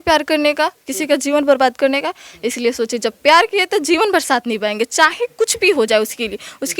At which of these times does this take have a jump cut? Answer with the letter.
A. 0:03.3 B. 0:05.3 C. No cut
C